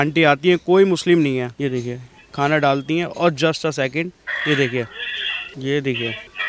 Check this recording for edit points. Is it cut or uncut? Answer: uncut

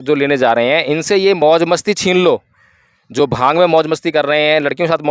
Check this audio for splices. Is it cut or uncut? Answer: uncut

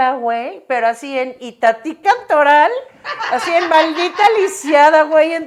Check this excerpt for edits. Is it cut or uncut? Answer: uncut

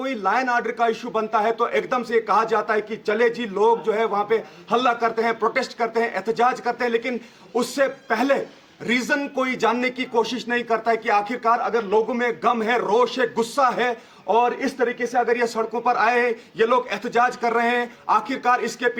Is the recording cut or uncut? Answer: uncut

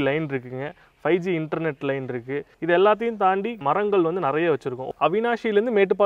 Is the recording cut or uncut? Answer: cut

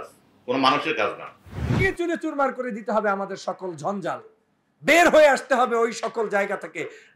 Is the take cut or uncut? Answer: cut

